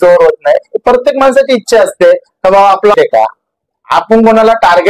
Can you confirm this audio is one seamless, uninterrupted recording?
no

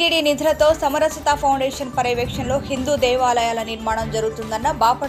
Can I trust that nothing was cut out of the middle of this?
yes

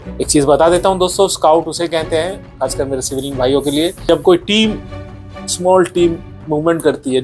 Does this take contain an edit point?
no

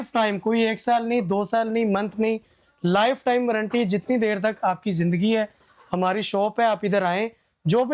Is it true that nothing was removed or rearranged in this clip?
yes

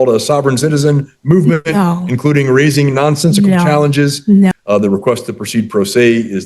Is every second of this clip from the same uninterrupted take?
no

